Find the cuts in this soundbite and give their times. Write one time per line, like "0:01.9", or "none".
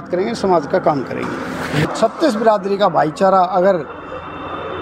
0:01.9

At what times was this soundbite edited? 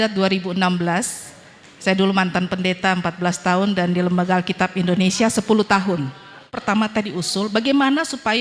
0:06.6

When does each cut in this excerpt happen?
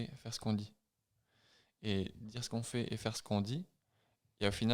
0:03.2

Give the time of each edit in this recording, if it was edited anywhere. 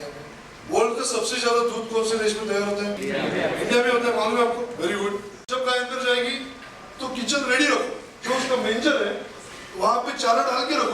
0:03.0
0:05.3

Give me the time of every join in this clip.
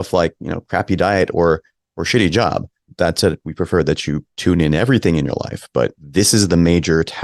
0:02.9
0:04.3
0:06.0

